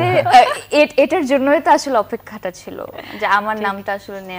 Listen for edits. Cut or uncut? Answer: uncut